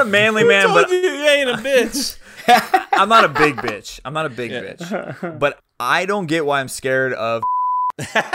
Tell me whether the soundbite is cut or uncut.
cut